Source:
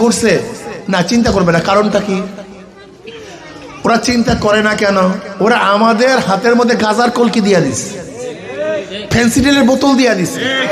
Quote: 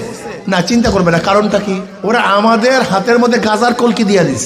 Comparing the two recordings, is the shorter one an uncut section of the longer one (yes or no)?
no